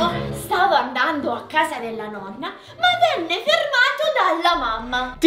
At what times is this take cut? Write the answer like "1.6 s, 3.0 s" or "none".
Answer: none